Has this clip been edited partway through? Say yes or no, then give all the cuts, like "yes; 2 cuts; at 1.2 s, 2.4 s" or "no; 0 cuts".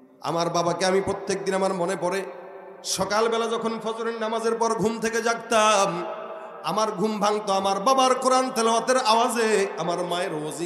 no; 0 cuts